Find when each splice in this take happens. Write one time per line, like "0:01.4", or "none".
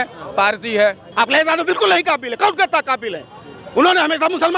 0:01.0